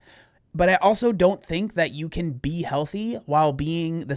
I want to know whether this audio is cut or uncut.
uncut